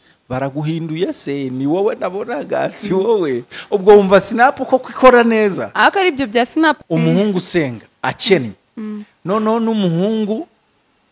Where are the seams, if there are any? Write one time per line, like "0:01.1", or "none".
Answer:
0:06.8